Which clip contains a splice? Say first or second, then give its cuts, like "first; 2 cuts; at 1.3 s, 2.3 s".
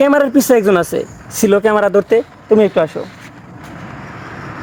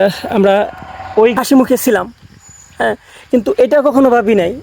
second; 1 cut; at 1.3 s